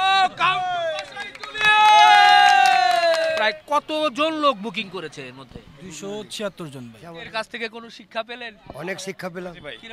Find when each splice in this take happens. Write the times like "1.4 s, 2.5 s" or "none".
3.4 s, 7.1 s